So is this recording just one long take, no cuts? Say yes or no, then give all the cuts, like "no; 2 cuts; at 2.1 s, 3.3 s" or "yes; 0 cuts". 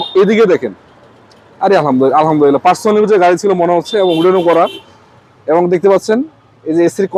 yes; 0 cuts